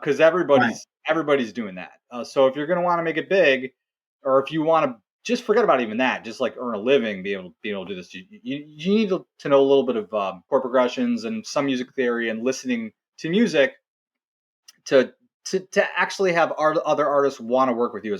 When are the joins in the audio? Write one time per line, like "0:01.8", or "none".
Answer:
0:10.5